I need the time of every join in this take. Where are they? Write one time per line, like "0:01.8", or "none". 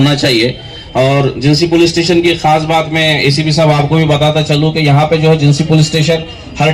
none